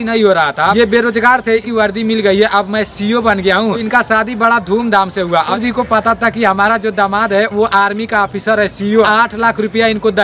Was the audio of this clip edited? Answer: yes; 5 cuts; at 0.7 s, 1.7 s, 3.8 s, 5.5 s, 9.1 s

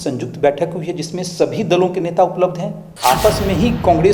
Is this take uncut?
no; 1 cut; at 2.9 s

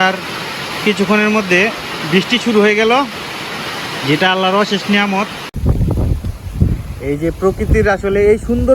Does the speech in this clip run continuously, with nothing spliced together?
no; 1 cut; at 5.5 s

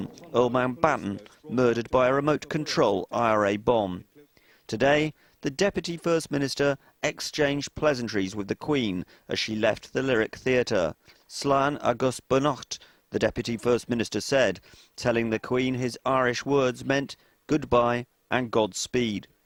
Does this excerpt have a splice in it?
no; 0 cuts

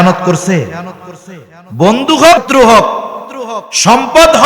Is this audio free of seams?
no; 1 cut; at 2.4 s

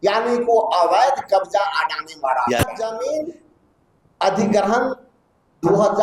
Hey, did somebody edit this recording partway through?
yes; 1 cut; at 2.8 s

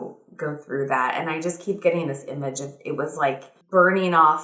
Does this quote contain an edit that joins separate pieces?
yes; 1 cut; at 3.5 s

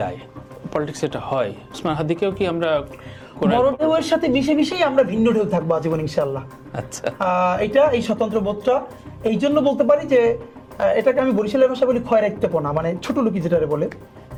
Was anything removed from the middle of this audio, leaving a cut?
no; 0 cuts

